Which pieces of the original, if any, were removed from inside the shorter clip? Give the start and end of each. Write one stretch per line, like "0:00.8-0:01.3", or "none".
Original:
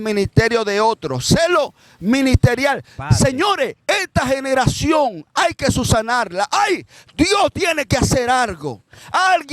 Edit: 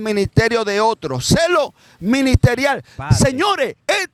none